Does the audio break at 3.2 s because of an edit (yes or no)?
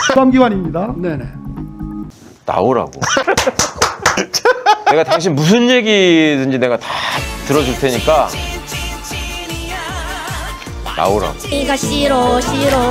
yes